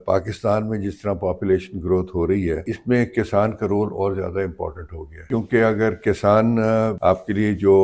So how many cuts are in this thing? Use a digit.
3